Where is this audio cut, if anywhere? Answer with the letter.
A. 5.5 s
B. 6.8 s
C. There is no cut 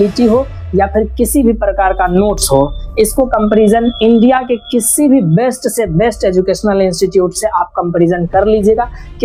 C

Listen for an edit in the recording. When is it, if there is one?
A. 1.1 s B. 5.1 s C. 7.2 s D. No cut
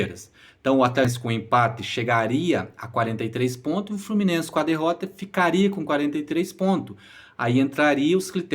A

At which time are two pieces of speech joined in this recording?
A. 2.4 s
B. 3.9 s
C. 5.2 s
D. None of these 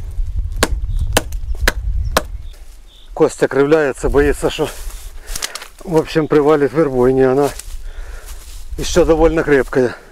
A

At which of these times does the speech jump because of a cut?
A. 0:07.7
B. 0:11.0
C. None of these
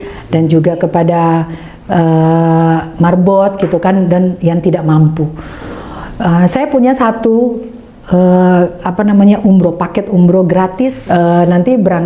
B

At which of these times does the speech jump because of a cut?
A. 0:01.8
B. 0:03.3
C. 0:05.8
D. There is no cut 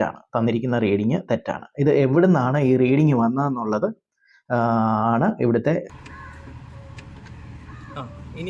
C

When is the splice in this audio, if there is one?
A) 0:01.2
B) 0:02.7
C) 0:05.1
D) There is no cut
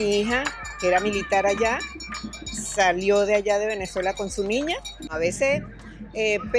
C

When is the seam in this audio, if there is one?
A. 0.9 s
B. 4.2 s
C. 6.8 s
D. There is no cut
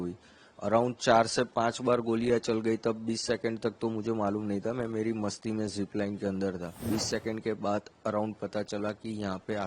C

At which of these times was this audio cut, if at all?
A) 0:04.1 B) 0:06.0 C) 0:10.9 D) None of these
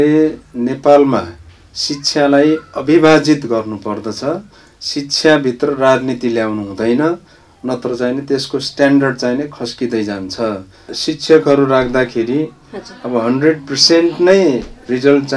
C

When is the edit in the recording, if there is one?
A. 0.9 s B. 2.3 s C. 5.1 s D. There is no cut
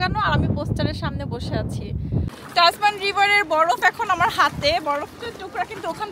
B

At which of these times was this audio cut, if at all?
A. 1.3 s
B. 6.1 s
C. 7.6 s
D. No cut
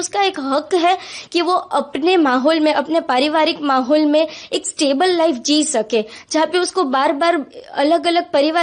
D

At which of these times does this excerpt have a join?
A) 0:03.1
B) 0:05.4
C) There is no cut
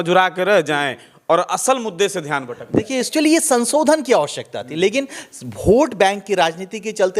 A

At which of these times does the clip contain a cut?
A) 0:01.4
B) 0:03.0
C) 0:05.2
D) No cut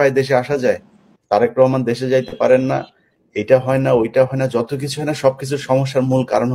A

